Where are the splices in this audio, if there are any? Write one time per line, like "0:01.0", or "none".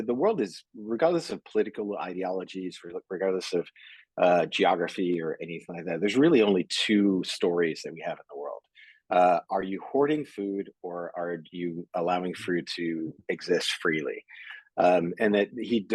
none